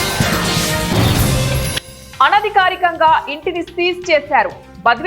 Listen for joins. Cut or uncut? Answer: cut